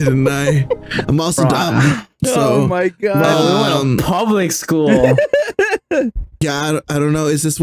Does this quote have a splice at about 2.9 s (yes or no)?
no